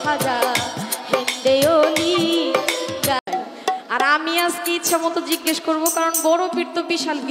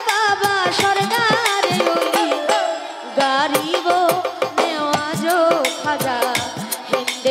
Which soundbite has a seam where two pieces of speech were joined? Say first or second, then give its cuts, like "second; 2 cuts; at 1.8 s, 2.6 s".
first; 1 cut; at 3.2 s